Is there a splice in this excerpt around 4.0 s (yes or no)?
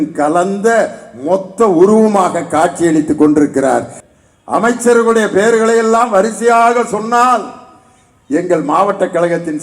yes